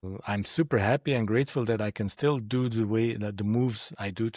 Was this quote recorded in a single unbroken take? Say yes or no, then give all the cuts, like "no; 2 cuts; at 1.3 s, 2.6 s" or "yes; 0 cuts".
yes; 0 cuts